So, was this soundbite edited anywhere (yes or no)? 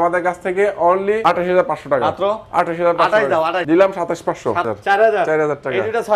yes